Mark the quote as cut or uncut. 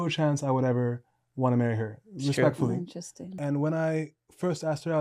cut